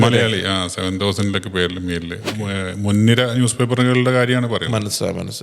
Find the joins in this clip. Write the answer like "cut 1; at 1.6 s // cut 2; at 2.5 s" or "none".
cut 1; at 2.4 s